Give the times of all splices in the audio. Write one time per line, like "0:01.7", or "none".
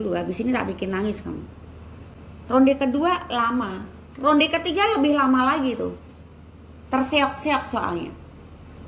0:01.7